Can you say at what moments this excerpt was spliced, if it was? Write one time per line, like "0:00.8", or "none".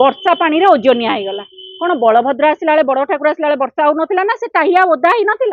none